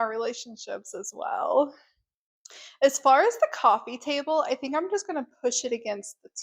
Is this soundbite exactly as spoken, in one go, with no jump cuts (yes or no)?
yes